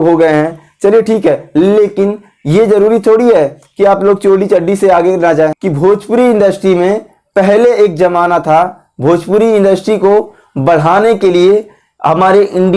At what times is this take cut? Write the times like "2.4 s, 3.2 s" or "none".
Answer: 5.6 s